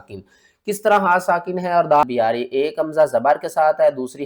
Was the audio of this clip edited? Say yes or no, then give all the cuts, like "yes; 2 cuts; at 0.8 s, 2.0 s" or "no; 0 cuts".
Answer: yes; 1 cut; at 2.0 s